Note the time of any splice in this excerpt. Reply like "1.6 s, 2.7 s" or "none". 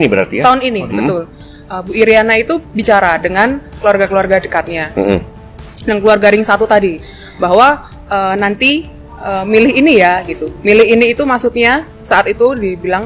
none

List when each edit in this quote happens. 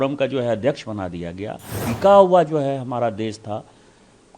1.7 s

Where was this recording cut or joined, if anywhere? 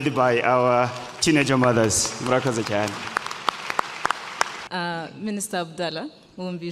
4.6 s

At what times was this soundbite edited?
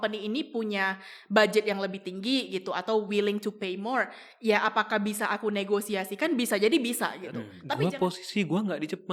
7.5 s

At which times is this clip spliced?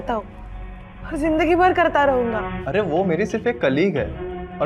2.5 s

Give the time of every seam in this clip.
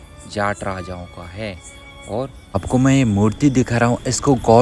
2.6 s

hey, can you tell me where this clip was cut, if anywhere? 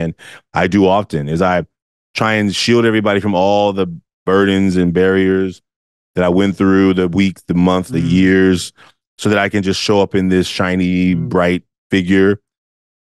7.9 s, 11.7 s

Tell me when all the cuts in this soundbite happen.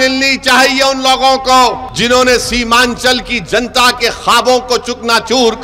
1.9 s

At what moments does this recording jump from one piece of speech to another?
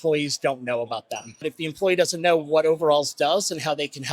1.5 s

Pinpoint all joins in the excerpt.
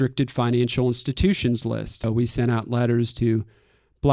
2.0 s

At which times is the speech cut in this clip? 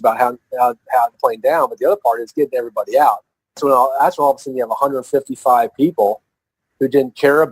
1.1 s, 3.6 s

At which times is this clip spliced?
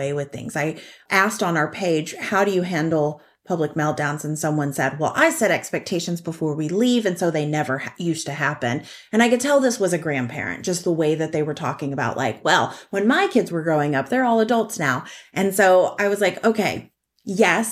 1.0 s

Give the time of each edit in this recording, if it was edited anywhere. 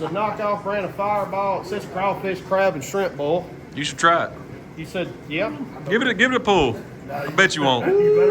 4.6 s

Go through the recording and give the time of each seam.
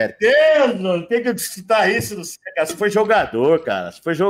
none

